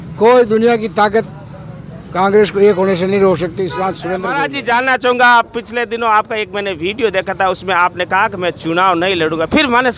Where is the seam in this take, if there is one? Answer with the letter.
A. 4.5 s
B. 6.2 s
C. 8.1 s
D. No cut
A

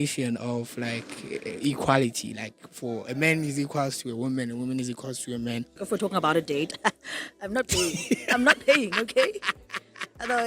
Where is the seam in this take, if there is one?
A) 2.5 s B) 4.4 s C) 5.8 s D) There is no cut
C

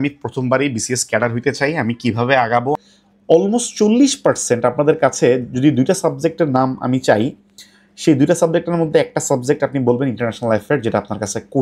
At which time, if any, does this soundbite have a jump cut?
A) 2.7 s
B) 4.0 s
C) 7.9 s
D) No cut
A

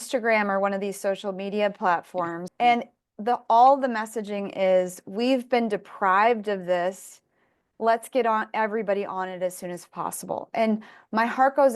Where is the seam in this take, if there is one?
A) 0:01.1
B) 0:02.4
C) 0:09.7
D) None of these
B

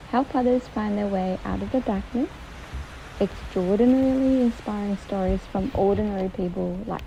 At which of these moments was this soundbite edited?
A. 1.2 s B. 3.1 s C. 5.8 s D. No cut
D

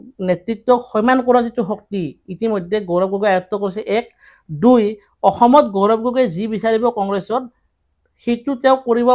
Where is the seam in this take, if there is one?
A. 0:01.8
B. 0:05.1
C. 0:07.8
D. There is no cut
D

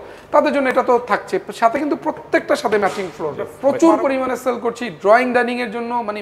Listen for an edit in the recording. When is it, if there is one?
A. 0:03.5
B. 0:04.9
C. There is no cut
A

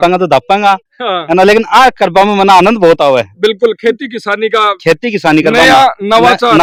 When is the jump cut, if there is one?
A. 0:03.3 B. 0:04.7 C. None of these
C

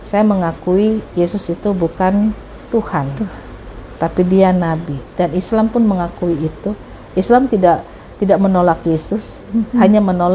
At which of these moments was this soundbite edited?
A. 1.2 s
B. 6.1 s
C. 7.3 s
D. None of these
D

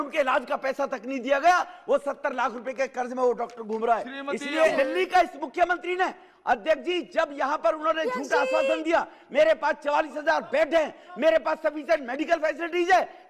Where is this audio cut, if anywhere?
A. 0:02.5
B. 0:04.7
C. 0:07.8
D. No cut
B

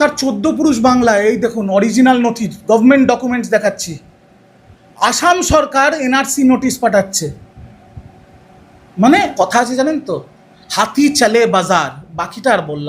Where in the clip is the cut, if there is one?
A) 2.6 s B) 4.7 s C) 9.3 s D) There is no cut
C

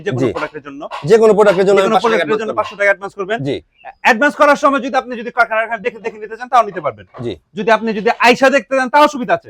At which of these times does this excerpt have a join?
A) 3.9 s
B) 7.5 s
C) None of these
C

